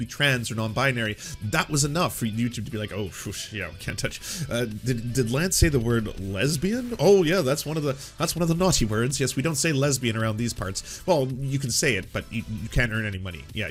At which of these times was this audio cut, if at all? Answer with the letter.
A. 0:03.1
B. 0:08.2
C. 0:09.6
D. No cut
D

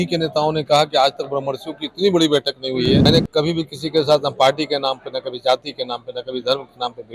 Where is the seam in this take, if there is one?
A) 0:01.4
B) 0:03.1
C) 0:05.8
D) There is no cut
B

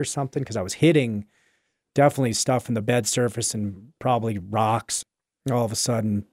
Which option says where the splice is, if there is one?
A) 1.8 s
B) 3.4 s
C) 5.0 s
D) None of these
C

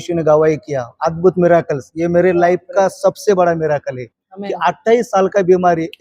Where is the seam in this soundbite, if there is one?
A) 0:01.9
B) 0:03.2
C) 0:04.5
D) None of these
D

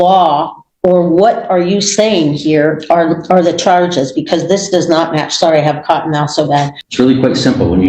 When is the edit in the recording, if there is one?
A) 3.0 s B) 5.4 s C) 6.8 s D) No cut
C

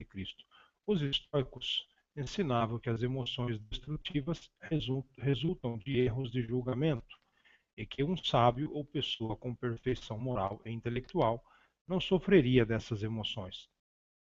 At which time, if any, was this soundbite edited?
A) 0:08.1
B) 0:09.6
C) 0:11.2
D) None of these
D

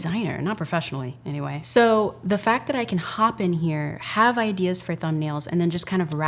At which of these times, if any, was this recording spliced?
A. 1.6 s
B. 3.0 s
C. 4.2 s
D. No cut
A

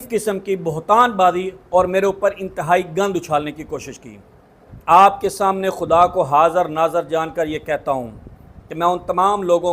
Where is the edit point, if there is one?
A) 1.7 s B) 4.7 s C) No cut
B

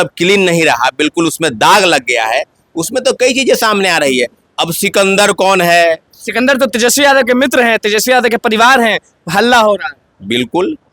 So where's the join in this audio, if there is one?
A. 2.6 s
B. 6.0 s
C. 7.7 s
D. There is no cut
D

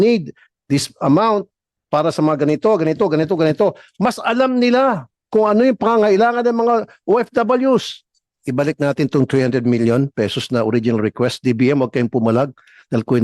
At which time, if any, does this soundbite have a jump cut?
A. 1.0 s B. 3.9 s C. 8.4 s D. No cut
C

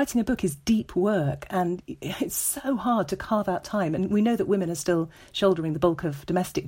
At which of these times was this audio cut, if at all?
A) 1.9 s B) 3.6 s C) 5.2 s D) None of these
D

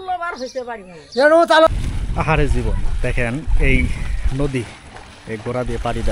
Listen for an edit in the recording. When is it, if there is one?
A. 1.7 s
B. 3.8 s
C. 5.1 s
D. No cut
A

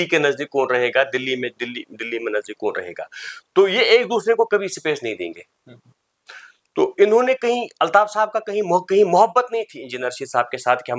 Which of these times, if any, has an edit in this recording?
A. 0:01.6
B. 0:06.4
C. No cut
C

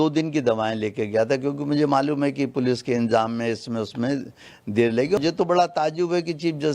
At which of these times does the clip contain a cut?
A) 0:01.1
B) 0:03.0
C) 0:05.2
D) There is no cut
C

